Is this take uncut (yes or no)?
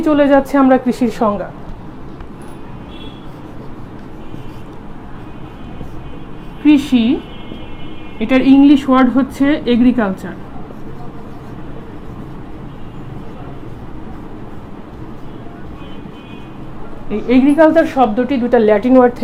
yes